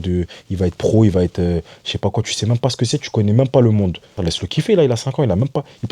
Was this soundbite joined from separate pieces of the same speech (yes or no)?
yes